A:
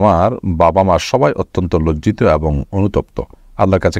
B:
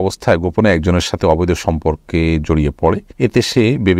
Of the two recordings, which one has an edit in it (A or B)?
B